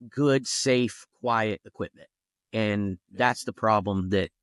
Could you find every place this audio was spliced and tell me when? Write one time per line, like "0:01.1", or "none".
none